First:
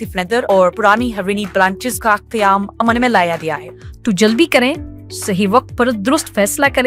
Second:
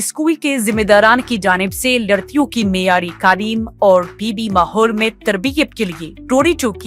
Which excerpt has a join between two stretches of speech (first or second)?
first